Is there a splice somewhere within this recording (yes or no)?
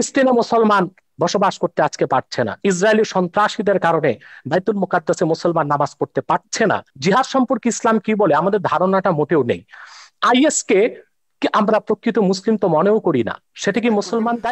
yes